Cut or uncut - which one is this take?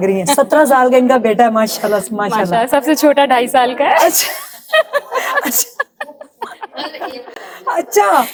uncut